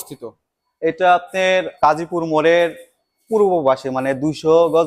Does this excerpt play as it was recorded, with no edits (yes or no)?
no